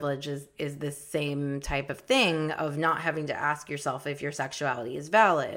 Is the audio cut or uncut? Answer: uncut